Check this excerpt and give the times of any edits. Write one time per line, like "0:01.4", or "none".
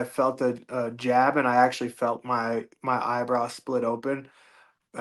none